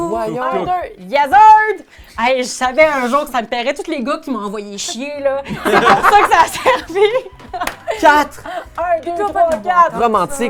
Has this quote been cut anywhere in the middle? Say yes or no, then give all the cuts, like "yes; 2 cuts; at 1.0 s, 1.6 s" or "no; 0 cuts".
no; 0 cuts